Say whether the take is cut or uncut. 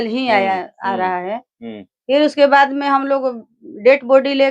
uncut